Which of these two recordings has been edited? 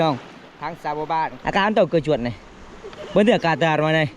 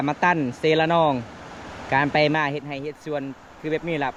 first; 1 cut; at 1.4 s

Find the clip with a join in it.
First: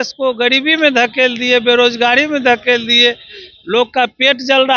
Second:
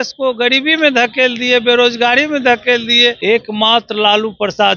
second; 1 cut; at 3.2 s

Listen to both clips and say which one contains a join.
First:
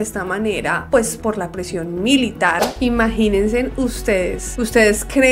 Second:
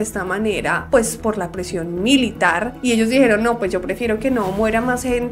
first; 1 cut; at 2.7 s

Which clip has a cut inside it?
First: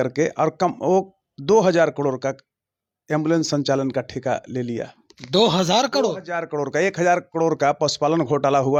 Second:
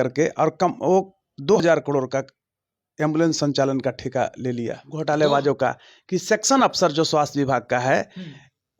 second; 2 cuts; at 1.6 s, 4.8 s

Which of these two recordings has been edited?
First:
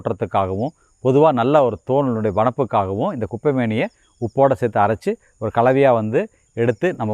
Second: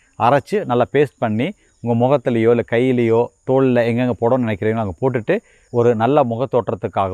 second; 1 cut; at 5.7 s

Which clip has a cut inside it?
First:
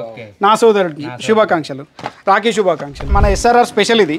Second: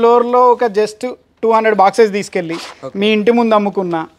first; 1 cut; at 3.0 s

